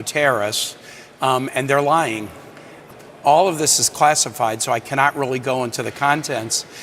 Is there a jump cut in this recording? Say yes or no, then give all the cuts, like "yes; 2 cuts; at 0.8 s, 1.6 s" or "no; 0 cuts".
yes; 1 cut; at 2.8 s